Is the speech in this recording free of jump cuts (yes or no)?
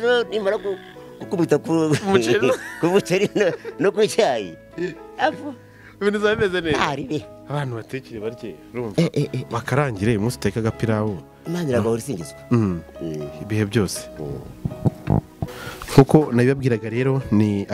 yes